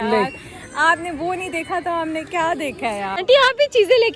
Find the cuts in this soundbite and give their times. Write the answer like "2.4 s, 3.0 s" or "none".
3.1 s